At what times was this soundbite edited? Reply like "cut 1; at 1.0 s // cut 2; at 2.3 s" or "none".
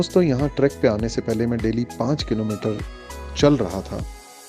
none